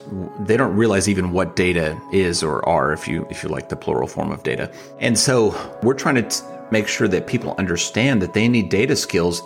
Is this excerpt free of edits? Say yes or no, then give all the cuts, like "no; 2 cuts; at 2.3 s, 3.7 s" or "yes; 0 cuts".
no; 2 cuts; at 4.8 s, 5.8 s